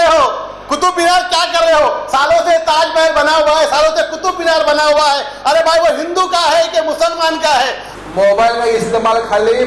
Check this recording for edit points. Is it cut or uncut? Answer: cut